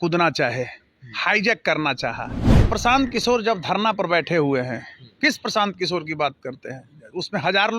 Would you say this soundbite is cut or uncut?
cut